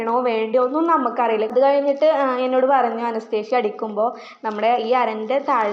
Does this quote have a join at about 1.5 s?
yes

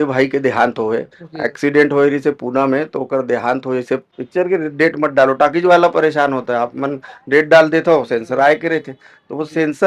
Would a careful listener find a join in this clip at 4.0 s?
yes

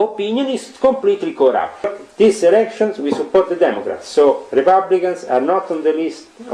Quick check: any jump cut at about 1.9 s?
yes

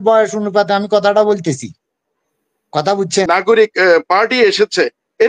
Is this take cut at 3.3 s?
yes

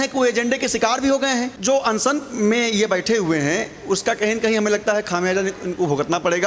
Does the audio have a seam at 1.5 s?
yes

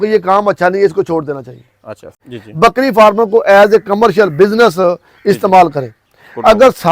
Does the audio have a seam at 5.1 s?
no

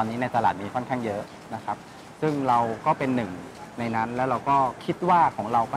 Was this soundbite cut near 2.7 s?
no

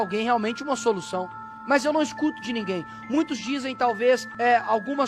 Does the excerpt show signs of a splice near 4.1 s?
yes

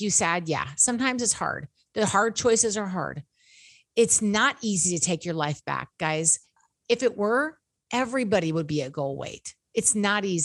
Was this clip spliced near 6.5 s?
yes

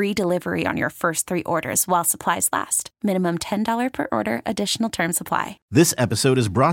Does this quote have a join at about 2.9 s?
no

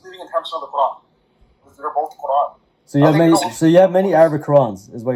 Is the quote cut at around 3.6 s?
no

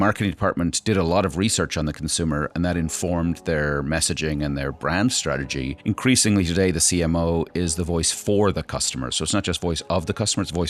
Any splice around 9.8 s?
no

